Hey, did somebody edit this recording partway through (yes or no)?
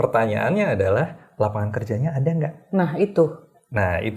no